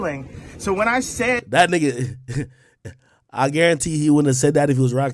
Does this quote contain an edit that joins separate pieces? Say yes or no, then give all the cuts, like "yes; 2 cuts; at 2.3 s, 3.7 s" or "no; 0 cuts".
no; 0 cuts